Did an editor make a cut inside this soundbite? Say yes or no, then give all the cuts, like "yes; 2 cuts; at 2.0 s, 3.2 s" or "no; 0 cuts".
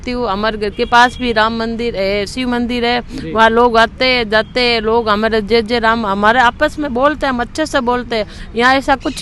no; 0 cuts